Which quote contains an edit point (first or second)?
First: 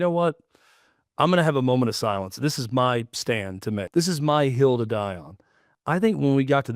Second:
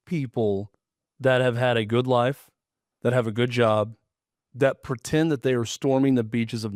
first